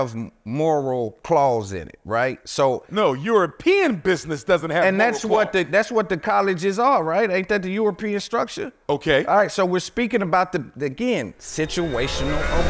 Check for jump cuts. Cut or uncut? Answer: uncut